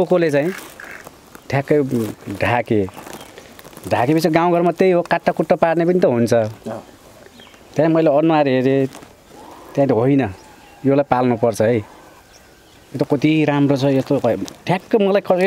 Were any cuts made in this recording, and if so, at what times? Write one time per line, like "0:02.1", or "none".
none